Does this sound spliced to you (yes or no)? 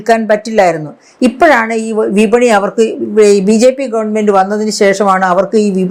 no